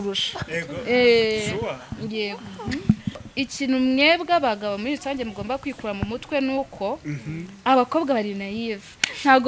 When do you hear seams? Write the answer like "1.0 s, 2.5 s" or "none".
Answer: 3.2 s